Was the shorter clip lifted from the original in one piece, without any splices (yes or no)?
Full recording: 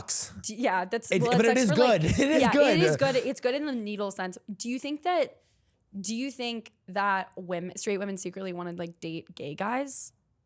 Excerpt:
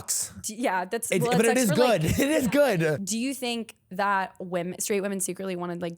no